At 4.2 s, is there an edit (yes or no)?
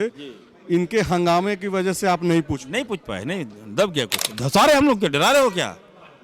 yes